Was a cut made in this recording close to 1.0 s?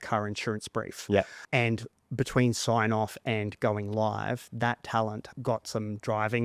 yes; 2 cuts; at 1.0 s, 5.3 s

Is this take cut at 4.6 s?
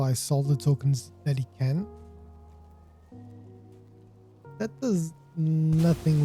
yes; 2 cuts; at 1.9 s, 4.6 s

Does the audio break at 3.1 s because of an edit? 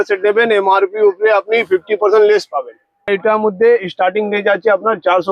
yes; 1 cut; at 3.1 s

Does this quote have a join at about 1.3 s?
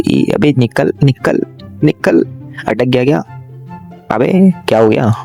no; 0 cuts

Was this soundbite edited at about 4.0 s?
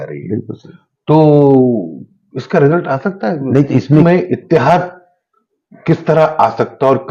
yes; 1 cut; at 4.0 s

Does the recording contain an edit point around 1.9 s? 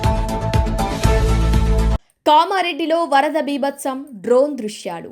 yes; 1 cut; at 1.9 s

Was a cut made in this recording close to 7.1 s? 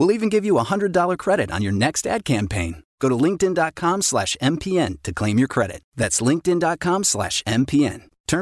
no; 0 cuts

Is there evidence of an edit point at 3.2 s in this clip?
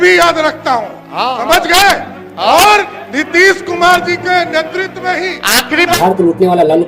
no; 1 cut; at 5.9 s

